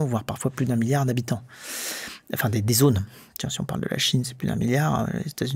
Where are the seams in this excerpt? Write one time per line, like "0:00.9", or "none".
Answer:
none